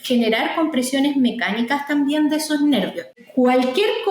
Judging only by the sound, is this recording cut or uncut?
cut